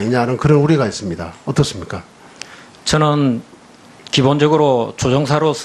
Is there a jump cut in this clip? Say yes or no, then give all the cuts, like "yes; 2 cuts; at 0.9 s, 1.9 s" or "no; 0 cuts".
yes; 1 cut; at 2.2 s